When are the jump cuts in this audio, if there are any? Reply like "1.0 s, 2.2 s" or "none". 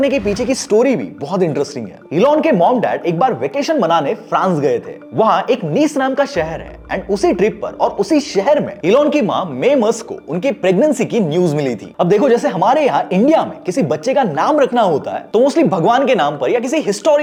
none